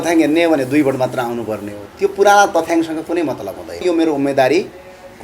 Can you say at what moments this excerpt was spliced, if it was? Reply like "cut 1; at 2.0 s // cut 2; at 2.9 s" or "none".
cut 1; at 3.8 s